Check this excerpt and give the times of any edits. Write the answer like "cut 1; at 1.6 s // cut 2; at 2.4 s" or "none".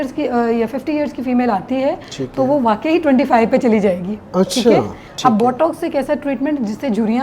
cut 1; at 5.0 s

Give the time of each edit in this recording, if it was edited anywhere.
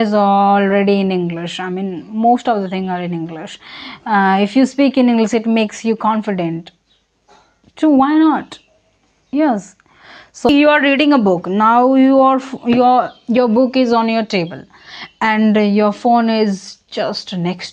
cut 1; at 10.5 s

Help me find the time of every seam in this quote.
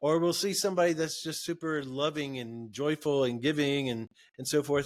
none

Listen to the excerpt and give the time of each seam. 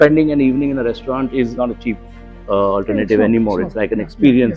cut 1; at 1.5 s

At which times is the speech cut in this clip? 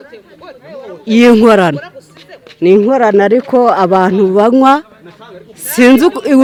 none

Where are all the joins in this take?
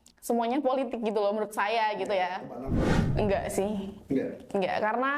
cut 1; at 2.9 s

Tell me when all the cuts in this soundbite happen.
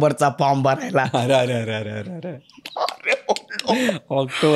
none

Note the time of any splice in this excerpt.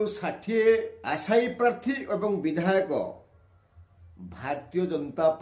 cut 1; at 1.0 s

